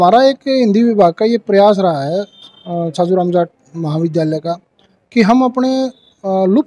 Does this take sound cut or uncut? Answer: uncut